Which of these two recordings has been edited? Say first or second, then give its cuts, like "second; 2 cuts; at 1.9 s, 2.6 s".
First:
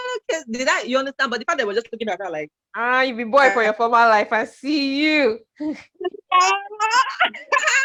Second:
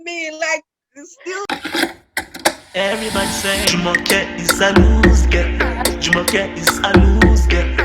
second; 1 cut; at 1.4 s